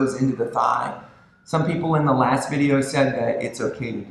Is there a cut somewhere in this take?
no; 0 cuts

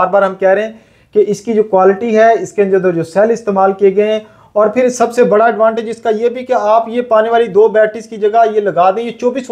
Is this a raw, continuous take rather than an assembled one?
yes; 0 cuts

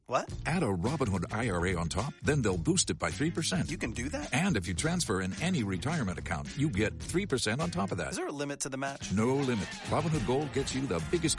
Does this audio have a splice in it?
no; 0 cuts

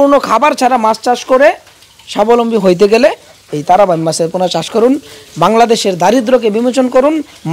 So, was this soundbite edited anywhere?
no; 0 cuts

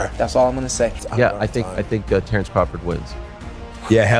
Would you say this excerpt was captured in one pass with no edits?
no; 1 cut; at 1.0 s

